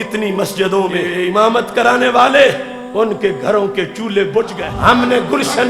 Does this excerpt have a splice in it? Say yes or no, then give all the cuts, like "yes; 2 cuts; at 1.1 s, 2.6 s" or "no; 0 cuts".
yes; 3 cuts; at 1.1 s, 2.7 s, 4.6 s